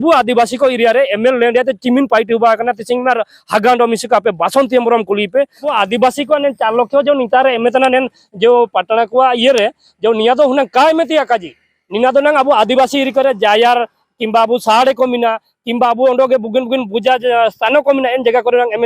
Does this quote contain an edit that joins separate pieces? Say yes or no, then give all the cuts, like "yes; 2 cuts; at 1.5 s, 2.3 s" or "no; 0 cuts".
yes; 1 cut; at 5.7 s